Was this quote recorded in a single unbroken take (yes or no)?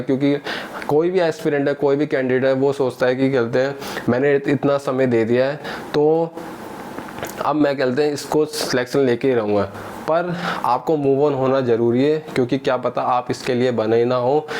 yes